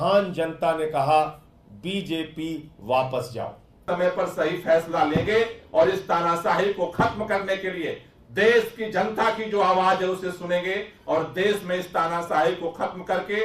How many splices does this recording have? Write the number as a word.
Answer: one